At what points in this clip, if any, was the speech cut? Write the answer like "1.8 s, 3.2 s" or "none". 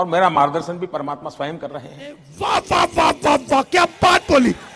2.3 s